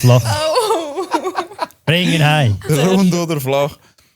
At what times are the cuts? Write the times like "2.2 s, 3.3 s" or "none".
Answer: 2.6 s

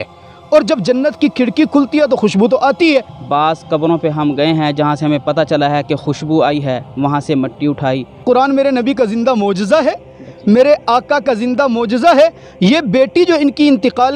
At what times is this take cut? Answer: 3.2 s, 8.2 s

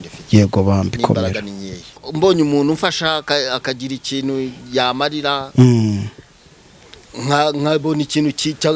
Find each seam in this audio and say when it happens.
2.0 s

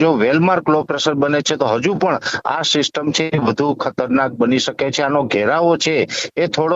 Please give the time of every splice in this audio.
none

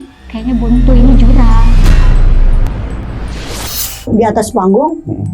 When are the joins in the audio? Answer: 4.1 s

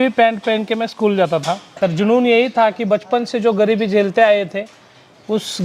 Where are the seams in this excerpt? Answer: 1.6 s

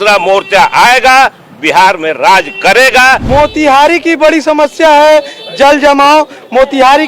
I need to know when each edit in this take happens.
3.2 s

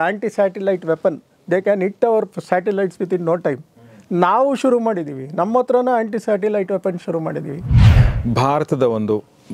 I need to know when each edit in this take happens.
7.9 s

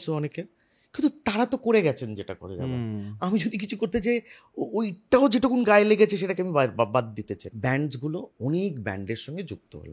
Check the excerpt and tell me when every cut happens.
7.4 s

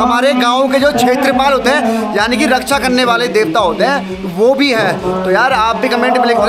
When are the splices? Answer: none

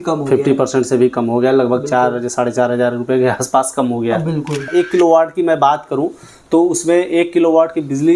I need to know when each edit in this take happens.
4.7 s

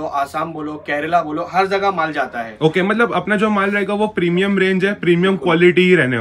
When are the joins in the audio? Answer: none

